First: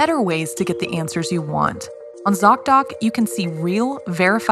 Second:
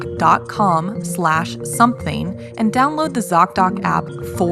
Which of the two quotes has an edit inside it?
first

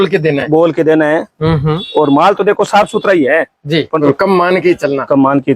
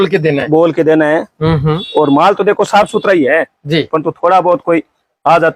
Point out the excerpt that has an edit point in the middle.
first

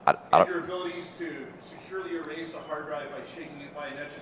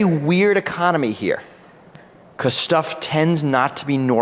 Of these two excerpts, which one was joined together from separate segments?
second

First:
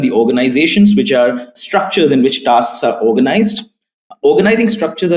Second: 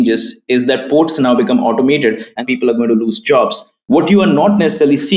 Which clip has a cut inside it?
second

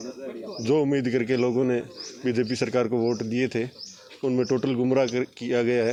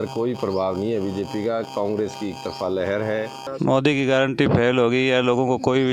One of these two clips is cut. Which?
second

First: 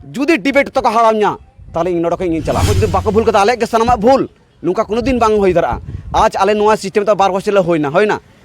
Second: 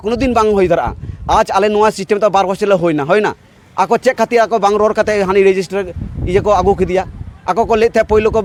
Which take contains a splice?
first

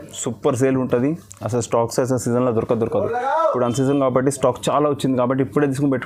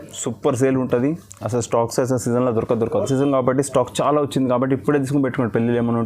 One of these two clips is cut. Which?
second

